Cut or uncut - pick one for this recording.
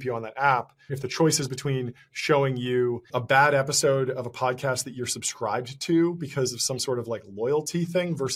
cut